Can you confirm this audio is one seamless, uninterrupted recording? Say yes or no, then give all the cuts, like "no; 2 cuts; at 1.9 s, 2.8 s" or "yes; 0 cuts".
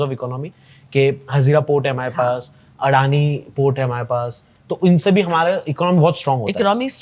yes; 0 cuts